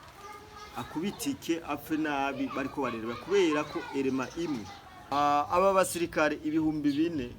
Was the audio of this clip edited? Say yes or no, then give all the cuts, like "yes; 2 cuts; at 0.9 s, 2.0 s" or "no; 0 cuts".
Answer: yes; 1 cut; at 5.1 s